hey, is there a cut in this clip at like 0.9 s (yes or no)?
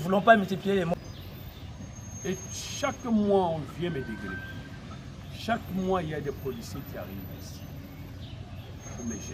yes